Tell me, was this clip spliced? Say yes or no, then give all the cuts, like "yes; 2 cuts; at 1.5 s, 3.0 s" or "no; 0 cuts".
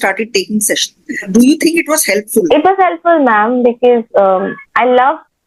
yes; 2 cuts; at 1.3 s, 2.5 s